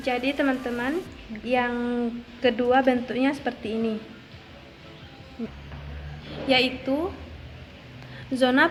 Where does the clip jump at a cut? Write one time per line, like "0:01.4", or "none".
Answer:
none